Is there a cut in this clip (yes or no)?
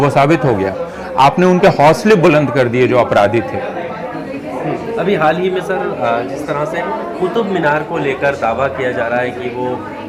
no